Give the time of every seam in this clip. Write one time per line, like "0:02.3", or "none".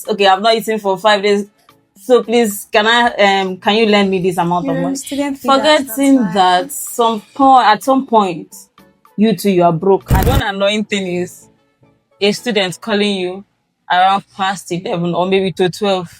0:10.1